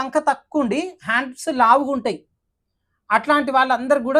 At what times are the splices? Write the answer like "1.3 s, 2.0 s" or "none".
none